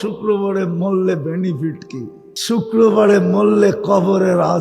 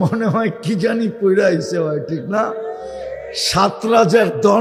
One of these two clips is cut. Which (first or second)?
first